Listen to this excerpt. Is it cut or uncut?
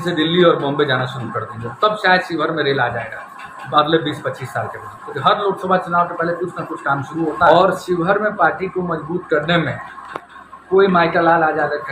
cut